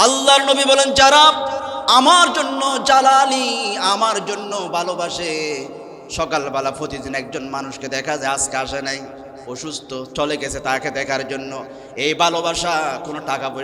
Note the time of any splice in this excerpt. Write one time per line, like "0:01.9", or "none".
none